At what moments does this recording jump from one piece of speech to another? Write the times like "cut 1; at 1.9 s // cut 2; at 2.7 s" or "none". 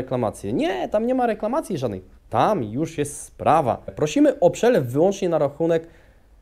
cut 1; at 3.9 s